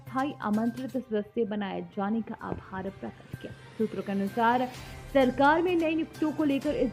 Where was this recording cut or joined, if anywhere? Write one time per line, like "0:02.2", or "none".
none